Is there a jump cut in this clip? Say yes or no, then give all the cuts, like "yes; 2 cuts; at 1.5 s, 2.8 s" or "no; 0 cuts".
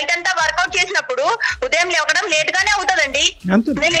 no; 0 cuts